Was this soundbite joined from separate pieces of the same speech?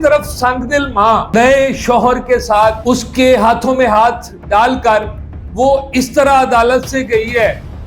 yes; 2 cuts; at 1.3 s, 2.8 s

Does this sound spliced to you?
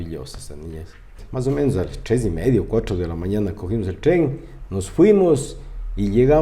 yes; 1 cut; at 1.2 s

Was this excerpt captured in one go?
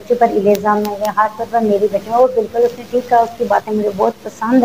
yes; 0 cuts

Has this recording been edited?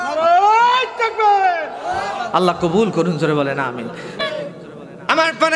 no; 0 cuts

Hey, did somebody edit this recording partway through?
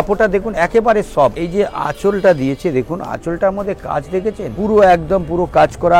yes; 2 cuts; at 1.4 s, 4.5 s

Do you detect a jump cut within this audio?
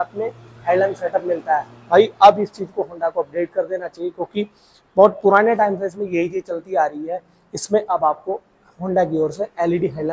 no; 0 cuts

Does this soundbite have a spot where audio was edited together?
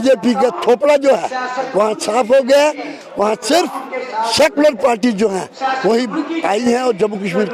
no; 0 cuts

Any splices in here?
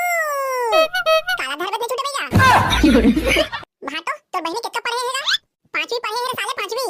yes; 1 cut; at 3.5 s

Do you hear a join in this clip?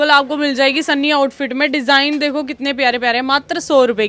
no; 0 cuts

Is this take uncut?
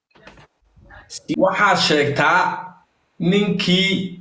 no; 1 cut; at 1.4 s

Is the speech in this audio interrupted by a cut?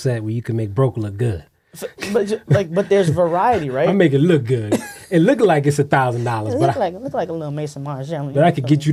no; 0 cuts

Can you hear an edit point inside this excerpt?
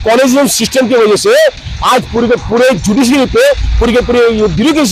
no; 0 cuts

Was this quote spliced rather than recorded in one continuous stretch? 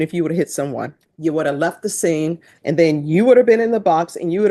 yes; 2 cuts; at 1.0 s, 2.5 s

